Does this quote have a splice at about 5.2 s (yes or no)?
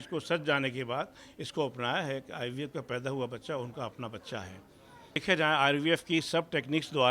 yes